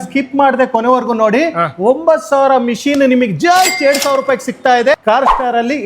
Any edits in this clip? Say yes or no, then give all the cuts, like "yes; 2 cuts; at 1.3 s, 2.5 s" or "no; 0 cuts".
yes; 1 cut; at 4.9 s